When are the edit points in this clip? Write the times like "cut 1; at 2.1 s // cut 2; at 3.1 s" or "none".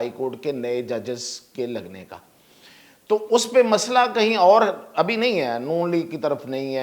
none